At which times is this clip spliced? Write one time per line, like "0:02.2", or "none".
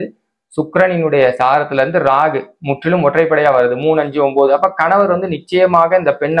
none